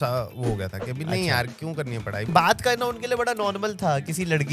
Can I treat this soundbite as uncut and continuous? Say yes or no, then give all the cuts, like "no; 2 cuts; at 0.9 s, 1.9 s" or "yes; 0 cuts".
no; 1 cut; at 2.3 s